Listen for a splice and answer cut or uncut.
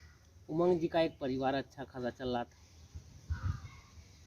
cut